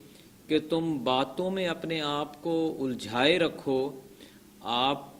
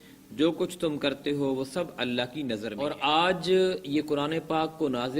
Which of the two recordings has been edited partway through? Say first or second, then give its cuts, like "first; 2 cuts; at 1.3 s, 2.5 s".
second; 1 cut; at 2.7 s